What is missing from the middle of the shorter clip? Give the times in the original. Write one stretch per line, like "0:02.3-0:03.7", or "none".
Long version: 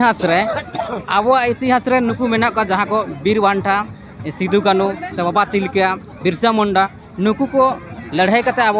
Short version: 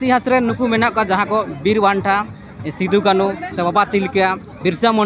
none